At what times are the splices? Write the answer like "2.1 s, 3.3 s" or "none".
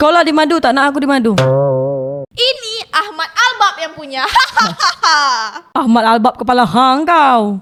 none